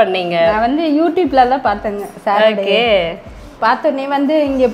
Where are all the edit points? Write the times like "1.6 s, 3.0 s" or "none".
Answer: none